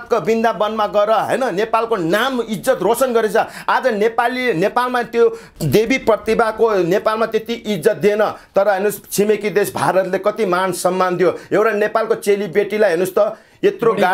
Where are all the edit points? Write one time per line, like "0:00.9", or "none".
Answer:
0:05.5